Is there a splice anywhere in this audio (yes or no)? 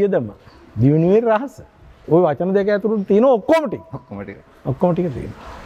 no